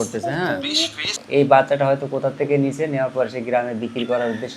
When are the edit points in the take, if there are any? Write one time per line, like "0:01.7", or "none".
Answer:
0:01.1